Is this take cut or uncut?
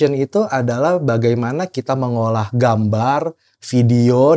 uncut